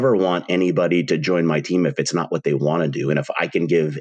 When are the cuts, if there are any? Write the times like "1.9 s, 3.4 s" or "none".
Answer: none

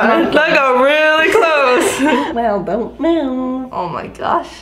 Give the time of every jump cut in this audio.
2.3 s

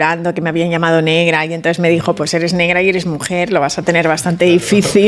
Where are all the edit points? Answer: none

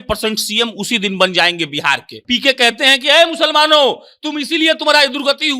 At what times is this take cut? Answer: 2.1 s

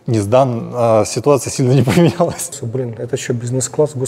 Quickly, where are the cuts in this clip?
2.6 s

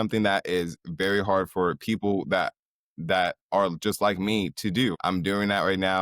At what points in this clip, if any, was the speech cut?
5.0 s

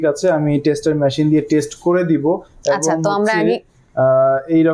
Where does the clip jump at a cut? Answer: none

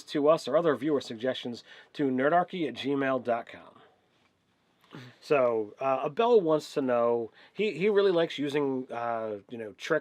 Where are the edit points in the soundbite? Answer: 5.1 s

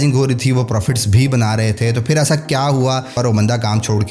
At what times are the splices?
3.2 s

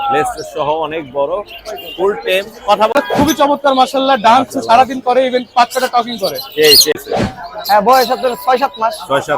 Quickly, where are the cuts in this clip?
2.9 s, 7.0 s

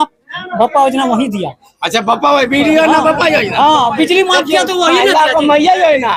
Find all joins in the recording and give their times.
none

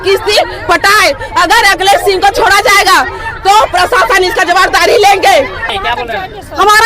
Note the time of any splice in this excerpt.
5.6 s

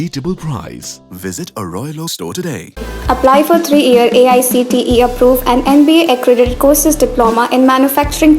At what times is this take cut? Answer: none

